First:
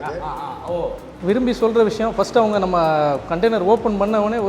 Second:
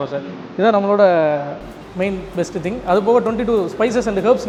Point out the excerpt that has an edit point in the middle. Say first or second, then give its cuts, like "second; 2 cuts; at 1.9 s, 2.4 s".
first; 1 cut; at 1.1 s